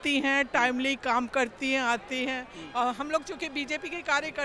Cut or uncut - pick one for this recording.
uncut